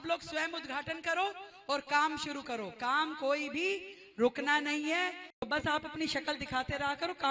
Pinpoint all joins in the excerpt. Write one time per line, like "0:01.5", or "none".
0:05.5